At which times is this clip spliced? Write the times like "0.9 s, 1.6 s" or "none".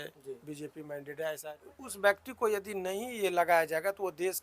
1.4 s